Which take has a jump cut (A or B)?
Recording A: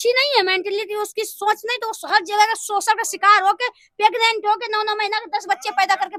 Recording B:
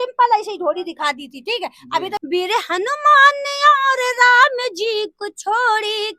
B